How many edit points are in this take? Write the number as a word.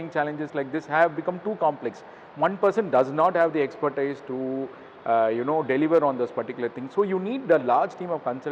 zero